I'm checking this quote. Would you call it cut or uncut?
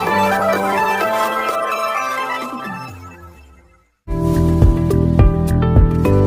cut